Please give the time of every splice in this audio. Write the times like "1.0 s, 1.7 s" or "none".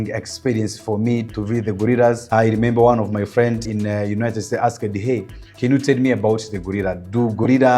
1.3 s, 2.2 s, 3.7 s